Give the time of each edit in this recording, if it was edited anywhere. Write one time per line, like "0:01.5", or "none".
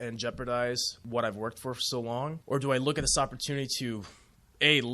0:00.9
0:02.4